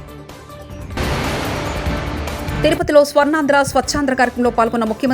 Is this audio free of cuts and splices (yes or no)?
no